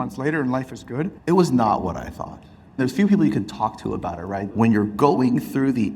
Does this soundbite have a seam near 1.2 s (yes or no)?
yes